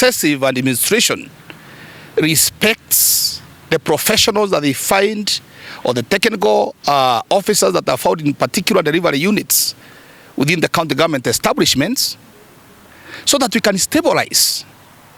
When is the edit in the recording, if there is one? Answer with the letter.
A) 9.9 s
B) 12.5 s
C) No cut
C